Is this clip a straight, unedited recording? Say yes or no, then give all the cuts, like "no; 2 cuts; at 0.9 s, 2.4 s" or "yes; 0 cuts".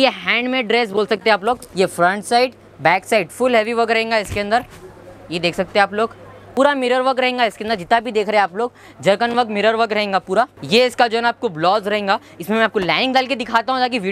no; 3 cuts; at 1.7 s, 6.4 s, 10.6 s